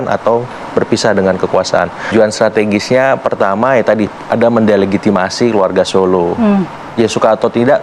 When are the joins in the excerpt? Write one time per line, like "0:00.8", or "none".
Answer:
0:02.1